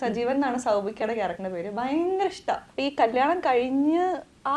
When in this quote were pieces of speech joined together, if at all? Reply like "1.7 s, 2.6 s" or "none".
2.7 s